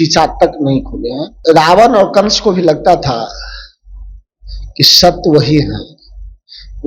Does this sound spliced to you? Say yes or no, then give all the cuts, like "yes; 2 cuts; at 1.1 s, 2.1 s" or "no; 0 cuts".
yes; 1 cut; at 1.3 s